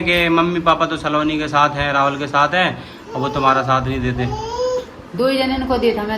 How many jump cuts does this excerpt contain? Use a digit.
0